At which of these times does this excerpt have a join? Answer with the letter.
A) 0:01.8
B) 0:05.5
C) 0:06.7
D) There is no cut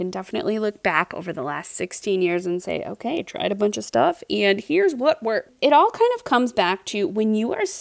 B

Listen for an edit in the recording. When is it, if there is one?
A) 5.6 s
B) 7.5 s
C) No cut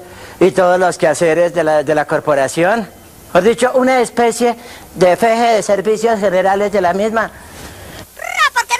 A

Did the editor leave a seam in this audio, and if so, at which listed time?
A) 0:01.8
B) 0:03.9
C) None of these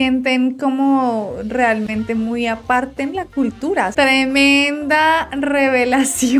B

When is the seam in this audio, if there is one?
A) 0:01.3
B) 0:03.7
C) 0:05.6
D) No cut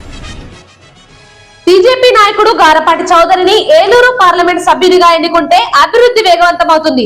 A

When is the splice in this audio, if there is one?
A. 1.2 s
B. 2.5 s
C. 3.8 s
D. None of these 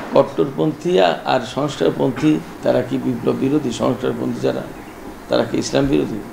B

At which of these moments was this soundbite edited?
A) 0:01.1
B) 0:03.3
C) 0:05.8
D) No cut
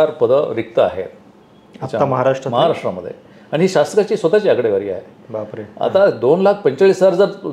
D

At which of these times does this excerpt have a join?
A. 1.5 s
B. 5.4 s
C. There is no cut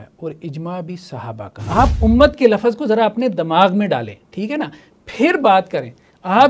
A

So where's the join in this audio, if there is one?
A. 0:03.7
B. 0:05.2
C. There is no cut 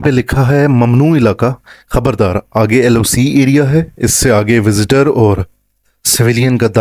C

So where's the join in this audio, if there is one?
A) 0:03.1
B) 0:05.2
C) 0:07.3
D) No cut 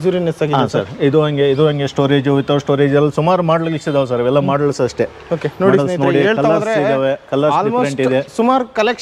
D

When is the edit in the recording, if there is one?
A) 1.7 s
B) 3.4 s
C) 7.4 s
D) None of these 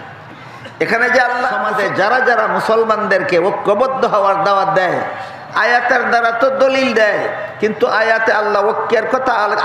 A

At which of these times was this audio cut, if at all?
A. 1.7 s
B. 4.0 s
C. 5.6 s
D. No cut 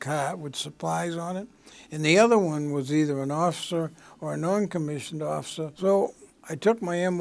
C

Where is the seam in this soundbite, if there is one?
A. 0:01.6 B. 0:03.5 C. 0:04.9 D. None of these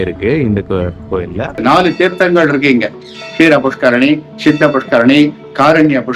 A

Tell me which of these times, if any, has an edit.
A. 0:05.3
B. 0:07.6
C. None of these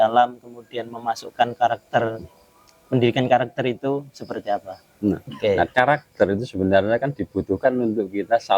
A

